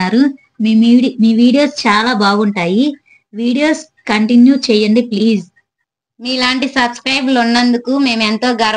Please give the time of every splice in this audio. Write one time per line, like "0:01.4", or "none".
0:06.1